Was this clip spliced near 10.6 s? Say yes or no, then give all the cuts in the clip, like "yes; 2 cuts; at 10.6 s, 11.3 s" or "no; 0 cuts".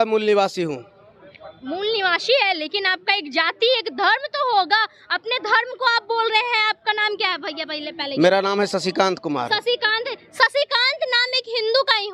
no; 0 cuts